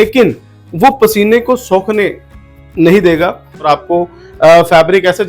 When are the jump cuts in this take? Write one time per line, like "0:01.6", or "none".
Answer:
0:03.6